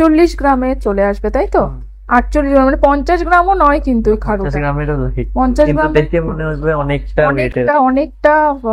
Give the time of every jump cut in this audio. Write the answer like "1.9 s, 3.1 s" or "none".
none